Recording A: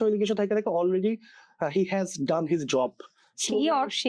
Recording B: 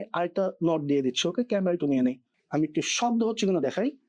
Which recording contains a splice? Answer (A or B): B